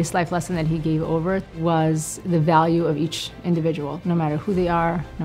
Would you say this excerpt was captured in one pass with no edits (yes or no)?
no